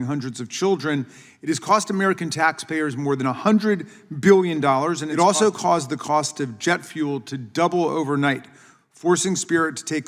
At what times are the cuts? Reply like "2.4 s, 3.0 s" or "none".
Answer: 5.1 s

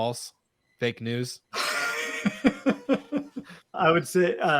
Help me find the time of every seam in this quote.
1.4 s, 3.7 s

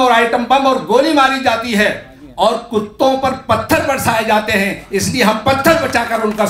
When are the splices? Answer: none

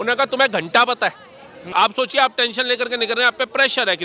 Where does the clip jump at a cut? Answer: 1.7 s

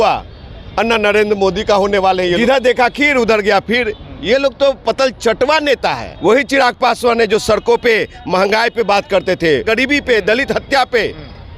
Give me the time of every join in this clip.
2.4 s, 6.1 s, 9.6 s

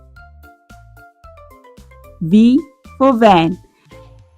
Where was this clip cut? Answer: 1.5 s, 3.6 s

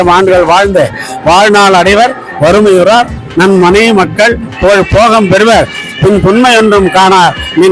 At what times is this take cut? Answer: none

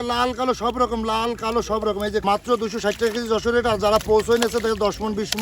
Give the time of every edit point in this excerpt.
2.2 s

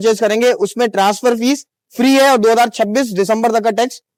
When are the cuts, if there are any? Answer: none

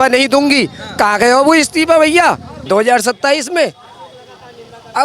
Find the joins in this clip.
2.5 s

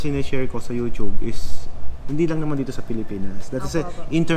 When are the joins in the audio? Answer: none

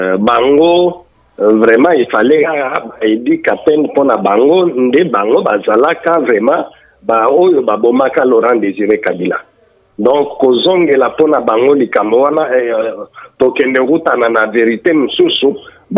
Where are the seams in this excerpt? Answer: none

